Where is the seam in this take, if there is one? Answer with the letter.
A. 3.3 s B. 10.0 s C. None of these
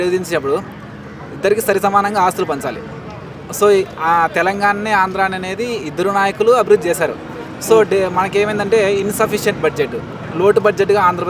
C